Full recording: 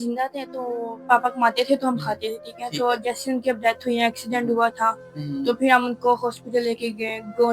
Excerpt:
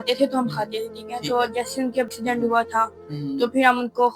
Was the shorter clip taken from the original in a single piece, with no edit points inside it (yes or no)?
no